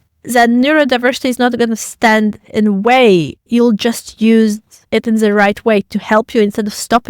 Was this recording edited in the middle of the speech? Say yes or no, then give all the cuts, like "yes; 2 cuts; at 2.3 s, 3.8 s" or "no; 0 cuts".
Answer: yes; 1 cut; at 3.4 s